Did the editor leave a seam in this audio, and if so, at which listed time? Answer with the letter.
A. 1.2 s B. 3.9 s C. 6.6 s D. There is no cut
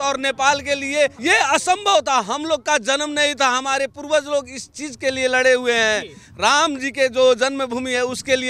A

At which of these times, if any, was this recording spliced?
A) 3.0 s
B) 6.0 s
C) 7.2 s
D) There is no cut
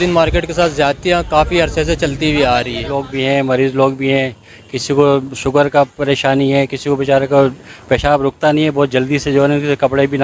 A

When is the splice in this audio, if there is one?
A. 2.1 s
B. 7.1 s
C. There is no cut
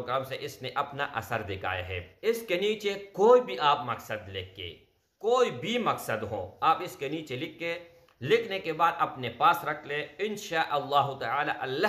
A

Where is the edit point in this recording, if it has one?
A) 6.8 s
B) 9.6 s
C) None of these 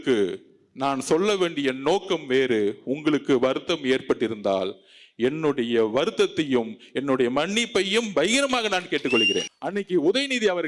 B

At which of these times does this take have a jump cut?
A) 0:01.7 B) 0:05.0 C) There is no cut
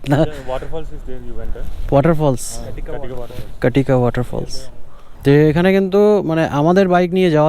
B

